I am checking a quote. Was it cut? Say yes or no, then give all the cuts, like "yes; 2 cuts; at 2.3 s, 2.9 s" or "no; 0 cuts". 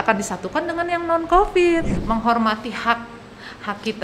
yes; 1 cut; at 1.9 s